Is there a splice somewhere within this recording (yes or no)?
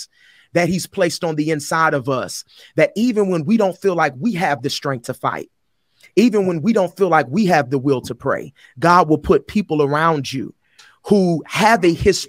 no